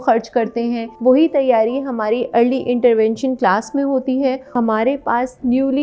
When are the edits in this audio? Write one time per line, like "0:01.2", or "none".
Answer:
0:00.9
0:04.5